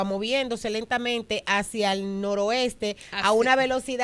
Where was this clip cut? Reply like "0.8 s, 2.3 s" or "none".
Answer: none